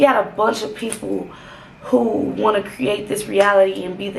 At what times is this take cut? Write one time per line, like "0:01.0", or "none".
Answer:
none